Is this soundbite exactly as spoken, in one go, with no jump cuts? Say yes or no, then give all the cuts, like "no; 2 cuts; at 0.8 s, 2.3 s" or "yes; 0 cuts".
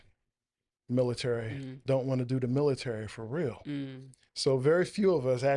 yes; 0 cuts